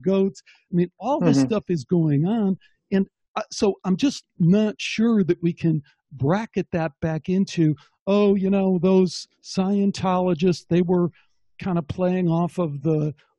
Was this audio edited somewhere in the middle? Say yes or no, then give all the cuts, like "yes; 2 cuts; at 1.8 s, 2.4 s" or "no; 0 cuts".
no; 0 cuts